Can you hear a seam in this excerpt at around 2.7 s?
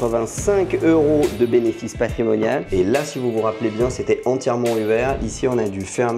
yes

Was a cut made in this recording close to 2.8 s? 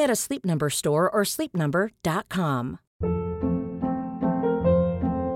yes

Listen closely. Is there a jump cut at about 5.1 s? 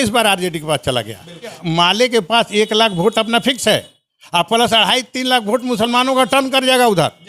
no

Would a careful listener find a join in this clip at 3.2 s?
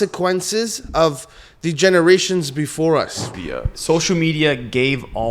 yes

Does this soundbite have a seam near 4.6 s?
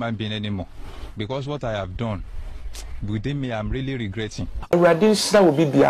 yes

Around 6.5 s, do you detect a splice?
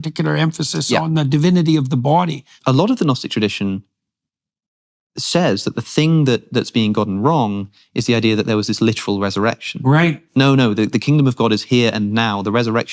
no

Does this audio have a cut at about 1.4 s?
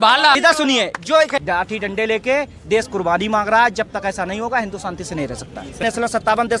yes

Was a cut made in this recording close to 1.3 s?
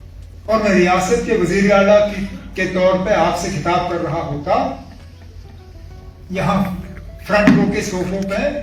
no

